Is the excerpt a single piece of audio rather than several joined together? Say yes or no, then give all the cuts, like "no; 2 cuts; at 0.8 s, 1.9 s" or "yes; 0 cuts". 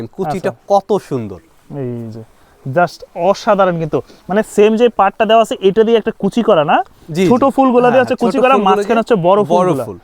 yes; 0 cuts